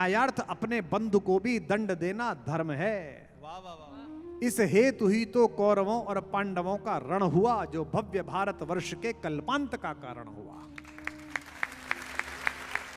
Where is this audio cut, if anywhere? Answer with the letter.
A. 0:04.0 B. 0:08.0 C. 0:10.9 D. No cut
D